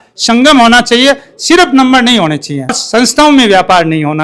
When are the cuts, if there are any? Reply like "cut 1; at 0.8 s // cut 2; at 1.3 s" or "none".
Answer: none